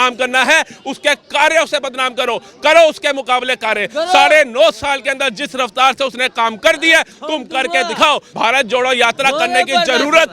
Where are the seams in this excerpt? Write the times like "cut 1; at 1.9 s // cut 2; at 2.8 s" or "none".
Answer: cut 1; at 8.3 s